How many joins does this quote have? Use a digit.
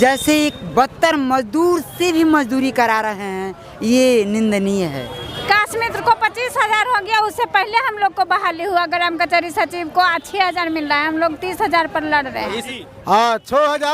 2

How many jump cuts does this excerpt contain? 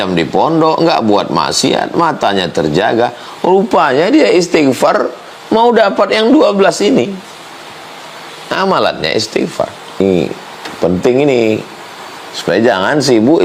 1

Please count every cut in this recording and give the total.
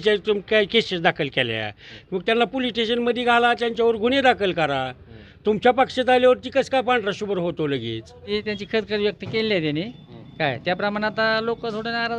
1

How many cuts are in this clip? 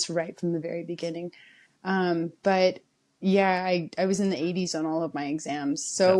0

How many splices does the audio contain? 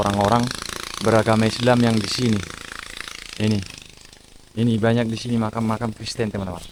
0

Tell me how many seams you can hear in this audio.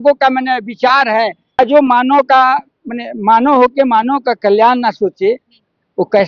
1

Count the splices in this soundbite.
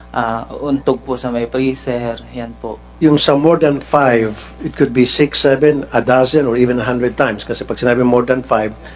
1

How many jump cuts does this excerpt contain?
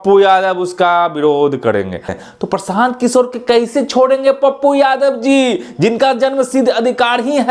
1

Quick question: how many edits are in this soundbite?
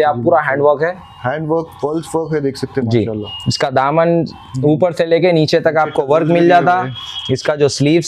0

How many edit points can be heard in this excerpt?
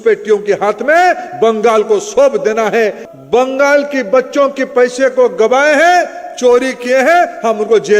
1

